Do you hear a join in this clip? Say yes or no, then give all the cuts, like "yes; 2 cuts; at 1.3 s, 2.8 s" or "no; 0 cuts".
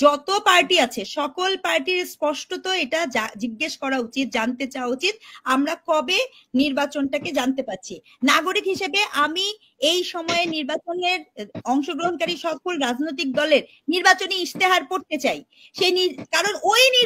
no; 0 cuts